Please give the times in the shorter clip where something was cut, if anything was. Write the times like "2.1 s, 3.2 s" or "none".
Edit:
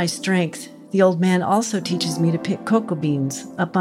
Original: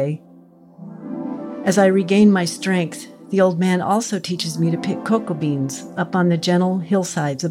none